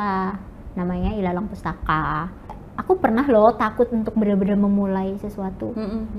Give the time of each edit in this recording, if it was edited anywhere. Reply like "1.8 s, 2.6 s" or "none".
2.5 s